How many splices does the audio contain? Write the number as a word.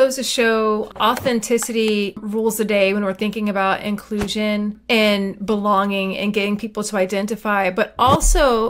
three